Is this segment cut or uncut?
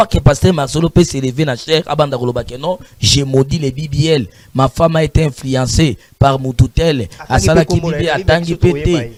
uncut